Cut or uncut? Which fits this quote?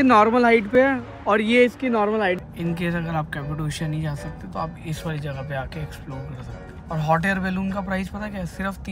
cut